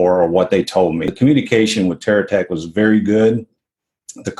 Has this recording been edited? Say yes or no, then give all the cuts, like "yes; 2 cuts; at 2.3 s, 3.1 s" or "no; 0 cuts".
yes; 1 cut; at 1.1 s